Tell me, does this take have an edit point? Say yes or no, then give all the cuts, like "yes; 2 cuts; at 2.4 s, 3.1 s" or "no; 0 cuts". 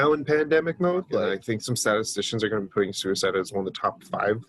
yes; 1 cut; at 1.3 s